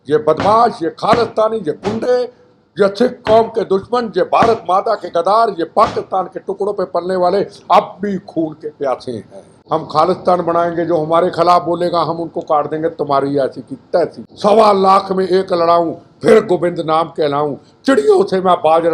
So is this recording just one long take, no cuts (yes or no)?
no